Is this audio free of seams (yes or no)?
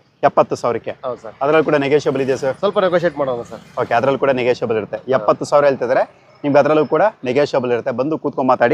yes